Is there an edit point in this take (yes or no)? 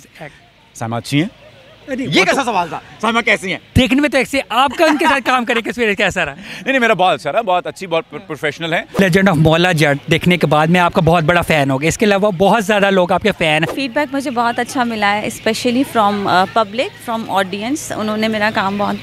yes